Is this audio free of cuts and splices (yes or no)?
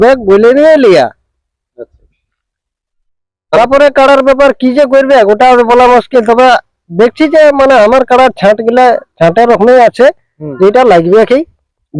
yes